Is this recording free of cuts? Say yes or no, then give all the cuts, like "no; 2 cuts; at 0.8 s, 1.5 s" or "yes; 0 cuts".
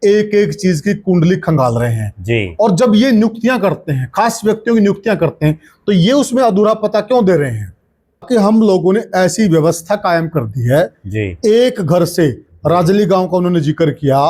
no; 1 cut; at 8.2 s